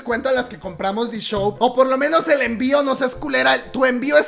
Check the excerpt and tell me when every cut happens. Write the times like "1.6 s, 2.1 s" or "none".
1.5 s

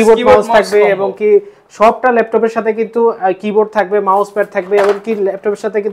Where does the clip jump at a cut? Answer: none

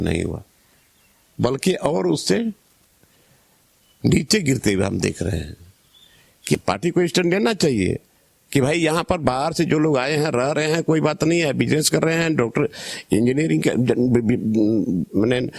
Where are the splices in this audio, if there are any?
6.5 s

